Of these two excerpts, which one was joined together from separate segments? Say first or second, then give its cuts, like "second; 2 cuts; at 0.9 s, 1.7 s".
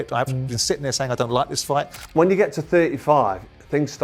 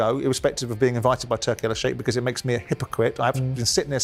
first; 1 cut; at 2.0 s